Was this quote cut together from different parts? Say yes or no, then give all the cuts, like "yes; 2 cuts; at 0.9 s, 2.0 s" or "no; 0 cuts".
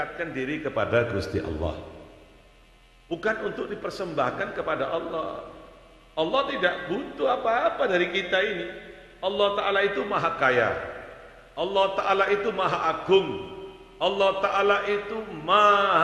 no; 0 cuts